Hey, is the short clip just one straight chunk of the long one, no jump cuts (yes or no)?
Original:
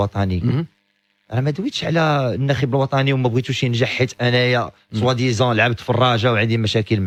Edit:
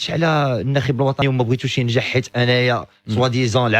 no